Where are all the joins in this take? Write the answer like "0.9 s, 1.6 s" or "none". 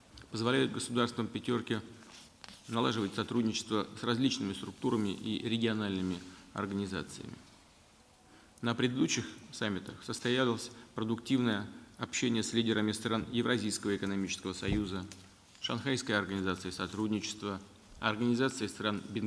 7.1 s